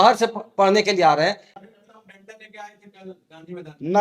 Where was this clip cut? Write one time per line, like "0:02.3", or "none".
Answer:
0:01.5